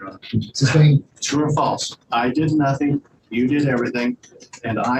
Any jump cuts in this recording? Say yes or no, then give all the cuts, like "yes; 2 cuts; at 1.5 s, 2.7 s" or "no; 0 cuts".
yes; 1 cut; at 1.2 s